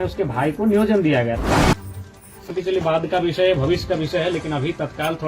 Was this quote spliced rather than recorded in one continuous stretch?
yes; 1 cut; at 1.4 s

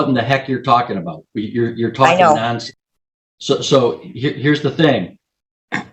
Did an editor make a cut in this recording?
no; 0 cuts

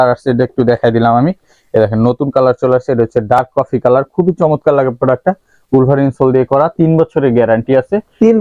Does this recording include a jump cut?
no; 0 cuts

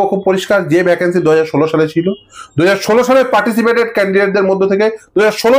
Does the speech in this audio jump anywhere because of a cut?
no; 0 cuts

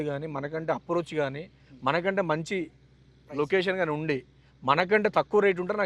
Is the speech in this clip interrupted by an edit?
no; 0 cuts

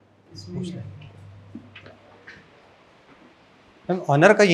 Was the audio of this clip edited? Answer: no; 0 cuts

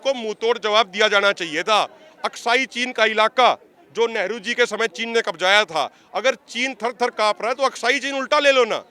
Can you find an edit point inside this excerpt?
no; 0 cuts

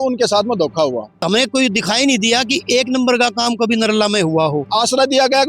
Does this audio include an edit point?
yes; 2 cuts; at 1.2 s, 4.7 s

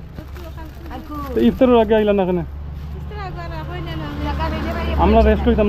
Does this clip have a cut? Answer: no; 0 cuts

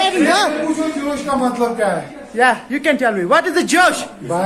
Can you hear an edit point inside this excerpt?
no; 0 cuts

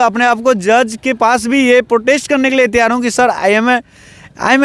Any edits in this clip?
no; 0 cuts

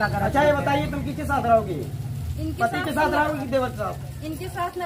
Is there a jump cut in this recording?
no; 0 cuts

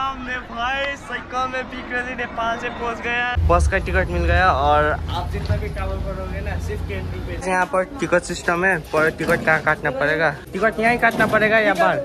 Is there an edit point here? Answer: yes; 3 cuts; at 3.4 s, 7.4 s, 10.4 s

